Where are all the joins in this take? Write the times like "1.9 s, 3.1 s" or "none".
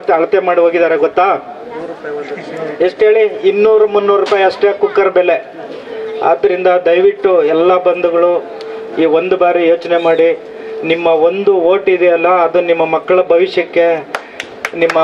none

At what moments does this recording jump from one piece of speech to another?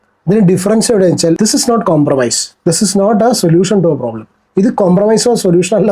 1.4 s

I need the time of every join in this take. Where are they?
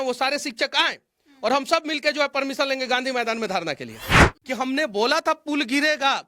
4.3 s

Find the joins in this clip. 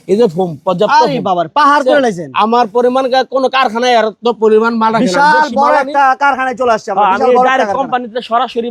none

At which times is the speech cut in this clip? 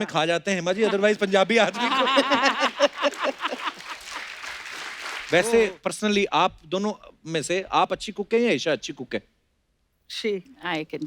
5.2 s

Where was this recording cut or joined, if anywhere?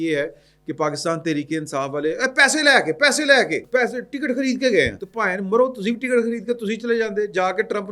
3.6 s, 5.0 s

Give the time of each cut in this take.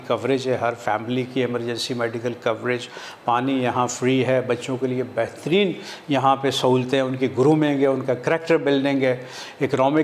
none

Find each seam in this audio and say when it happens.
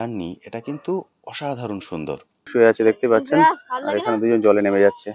2.5 s

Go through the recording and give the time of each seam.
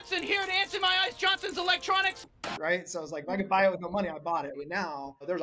2.2 s

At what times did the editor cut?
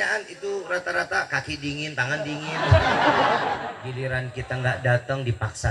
3.9 s

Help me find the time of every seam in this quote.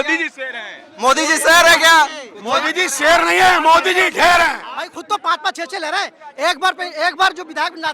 4.7 s

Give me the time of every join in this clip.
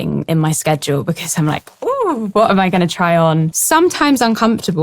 3.5 s

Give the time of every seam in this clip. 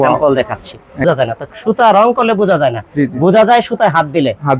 1.0 s

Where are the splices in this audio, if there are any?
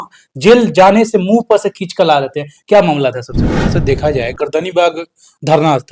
3.7 s

